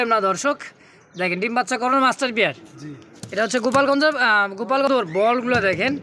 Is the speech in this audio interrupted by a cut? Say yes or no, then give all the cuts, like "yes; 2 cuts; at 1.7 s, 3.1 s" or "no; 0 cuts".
yes; 1 cut; at 4.9 s